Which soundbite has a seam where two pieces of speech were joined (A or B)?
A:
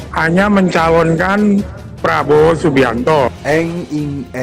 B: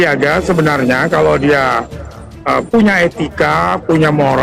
A